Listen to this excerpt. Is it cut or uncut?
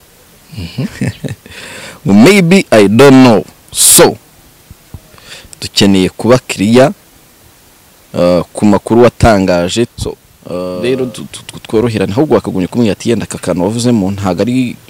cut